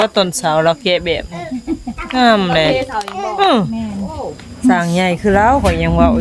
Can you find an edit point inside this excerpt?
no; 0 cuts

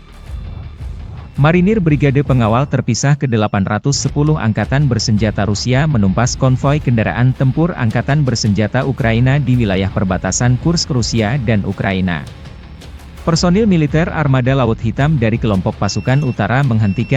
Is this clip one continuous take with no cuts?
no; 1 cut; at 1.3 s

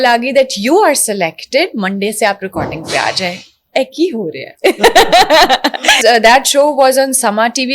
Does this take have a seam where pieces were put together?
yes; 1 cut; at 6.0 s

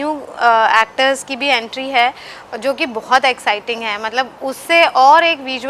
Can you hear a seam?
no; 0 cuts

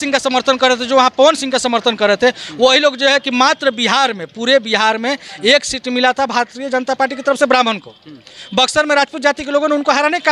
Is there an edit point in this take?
no; 0 cuts

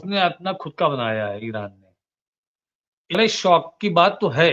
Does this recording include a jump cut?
yes; 1 cut; at 3.1 s

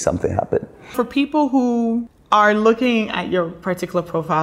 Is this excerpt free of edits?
no; 2 cuts; at 0.9 s, 2.1 s

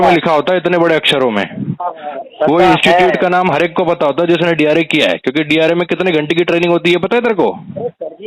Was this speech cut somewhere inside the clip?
no; 0 cuts

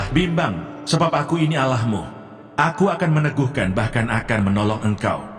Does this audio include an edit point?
no; 0 cuts

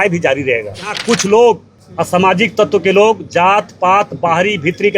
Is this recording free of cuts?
no; 2 cuts; at 0.9 s, 1.8 s

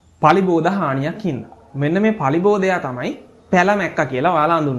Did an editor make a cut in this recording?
no; 0 cuts

